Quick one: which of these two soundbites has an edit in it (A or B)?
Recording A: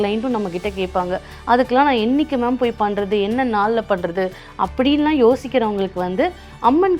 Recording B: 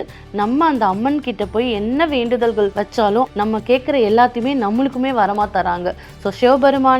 B